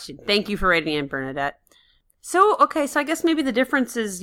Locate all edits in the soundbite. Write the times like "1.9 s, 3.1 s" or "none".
none